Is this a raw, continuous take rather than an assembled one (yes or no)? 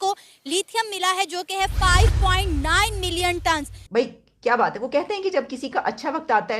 no